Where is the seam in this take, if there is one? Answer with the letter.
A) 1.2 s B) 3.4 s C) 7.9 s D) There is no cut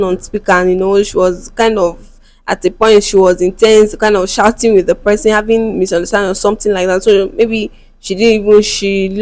D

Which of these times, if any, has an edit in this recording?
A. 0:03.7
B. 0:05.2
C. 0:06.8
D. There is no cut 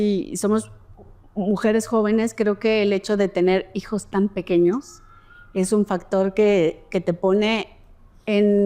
D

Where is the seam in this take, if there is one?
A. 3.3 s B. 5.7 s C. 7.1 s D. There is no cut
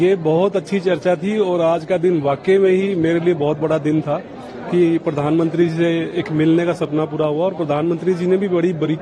D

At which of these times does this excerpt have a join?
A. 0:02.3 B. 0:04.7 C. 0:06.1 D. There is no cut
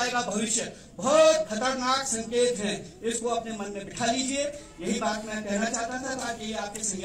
D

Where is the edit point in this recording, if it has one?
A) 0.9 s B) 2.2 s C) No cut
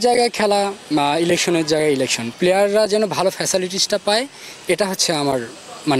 B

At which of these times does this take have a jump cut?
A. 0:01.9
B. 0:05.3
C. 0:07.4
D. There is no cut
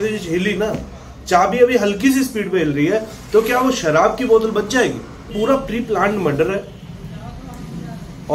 B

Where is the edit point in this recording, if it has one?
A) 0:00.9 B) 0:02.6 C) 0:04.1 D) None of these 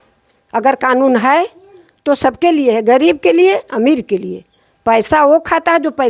D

